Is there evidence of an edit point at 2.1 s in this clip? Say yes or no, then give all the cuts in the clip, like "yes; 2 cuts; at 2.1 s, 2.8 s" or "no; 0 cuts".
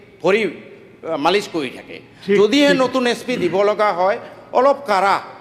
yes; 1 cut; at 2.1 s